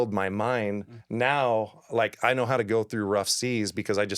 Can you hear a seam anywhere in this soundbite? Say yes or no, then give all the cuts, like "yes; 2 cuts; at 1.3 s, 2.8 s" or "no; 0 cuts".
yes; 1 cut; at 1.0 s